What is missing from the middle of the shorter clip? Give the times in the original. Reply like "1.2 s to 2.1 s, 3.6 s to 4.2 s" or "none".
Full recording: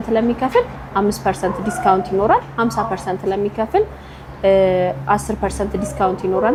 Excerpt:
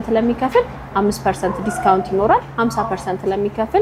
none